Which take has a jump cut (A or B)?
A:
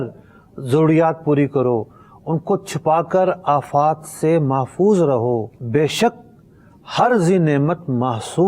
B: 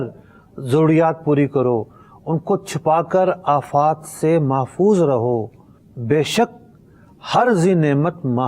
A